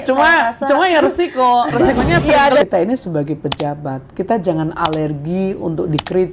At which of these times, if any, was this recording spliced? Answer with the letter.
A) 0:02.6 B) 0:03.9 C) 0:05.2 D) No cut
A